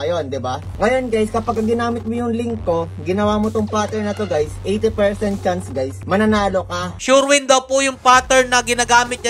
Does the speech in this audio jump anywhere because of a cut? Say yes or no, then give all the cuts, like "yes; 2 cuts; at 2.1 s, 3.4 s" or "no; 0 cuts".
yes; 1 cut; at 7.0 s